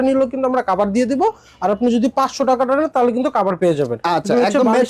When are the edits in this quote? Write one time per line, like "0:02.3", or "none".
none